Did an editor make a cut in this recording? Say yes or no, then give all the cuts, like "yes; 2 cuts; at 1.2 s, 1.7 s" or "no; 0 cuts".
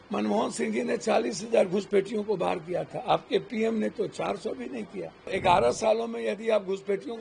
yes; 1 cut; at 5.3 s